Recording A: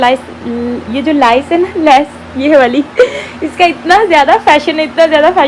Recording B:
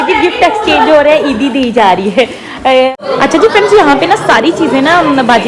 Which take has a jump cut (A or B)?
B